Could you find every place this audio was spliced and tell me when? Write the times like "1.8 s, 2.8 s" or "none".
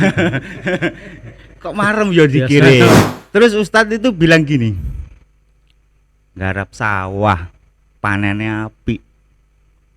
3.0 s

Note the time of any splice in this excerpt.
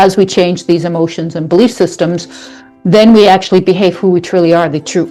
none

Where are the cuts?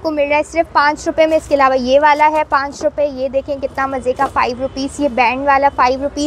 none

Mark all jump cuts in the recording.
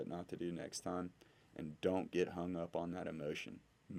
none

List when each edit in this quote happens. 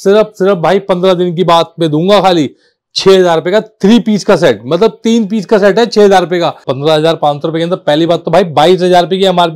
6.7 s

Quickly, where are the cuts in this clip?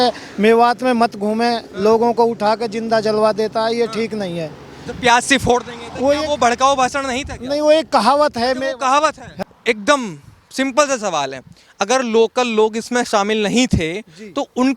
9.2 s

